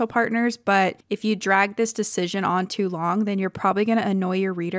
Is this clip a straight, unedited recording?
no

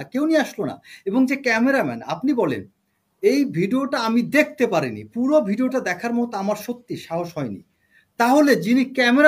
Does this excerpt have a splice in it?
no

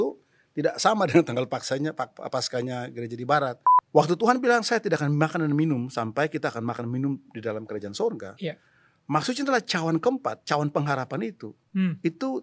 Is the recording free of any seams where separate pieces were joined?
no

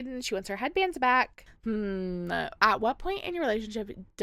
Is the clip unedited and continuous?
no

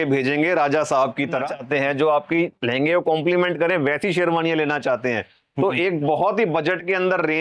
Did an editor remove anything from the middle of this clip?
yes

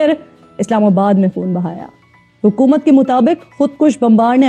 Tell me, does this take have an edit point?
no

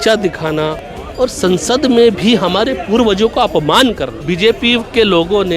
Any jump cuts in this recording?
yes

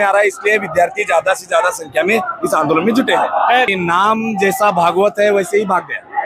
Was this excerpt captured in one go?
no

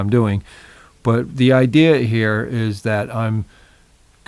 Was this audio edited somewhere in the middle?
no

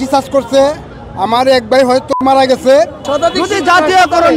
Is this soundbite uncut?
no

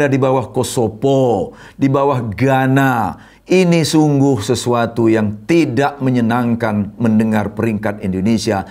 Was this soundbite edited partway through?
no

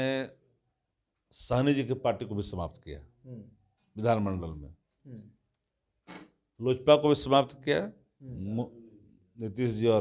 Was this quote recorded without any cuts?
yes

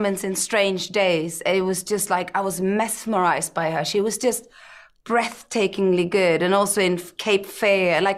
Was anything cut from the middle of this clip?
no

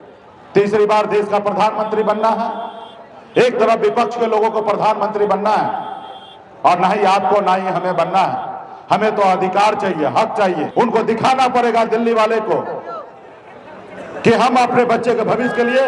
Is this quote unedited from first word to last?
no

